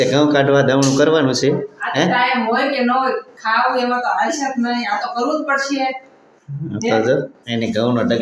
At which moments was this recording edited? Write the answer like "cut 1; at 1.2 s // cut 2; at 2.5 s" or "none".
none